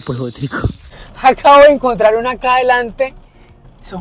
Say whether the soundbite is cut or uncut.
cut